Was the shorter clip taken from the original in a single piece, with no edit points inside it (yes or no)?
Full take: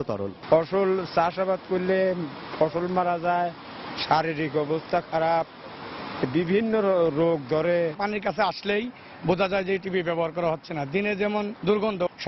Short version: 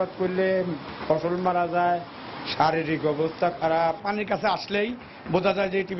no